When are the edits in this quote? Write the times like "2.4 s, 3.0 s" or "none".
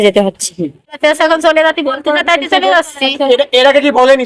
1.0 s